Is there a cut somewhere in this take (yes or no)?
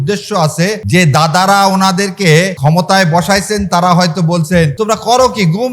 yes